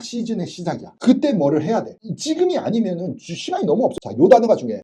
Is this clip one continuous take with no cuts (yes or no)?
no